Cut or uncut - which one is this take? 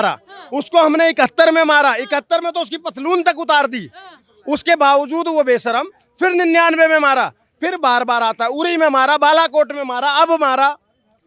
uncut